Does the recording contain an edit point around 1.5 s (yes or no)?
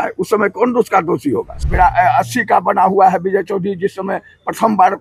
yes